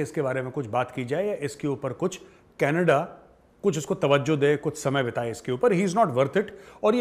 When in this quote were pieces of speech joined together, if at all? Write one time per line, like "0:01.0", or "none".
none